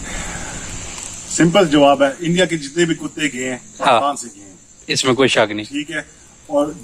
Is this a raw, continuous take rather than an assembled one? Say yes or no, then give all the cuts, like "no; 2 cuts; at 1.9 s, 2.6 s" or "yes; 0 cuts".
yes; 0 cuts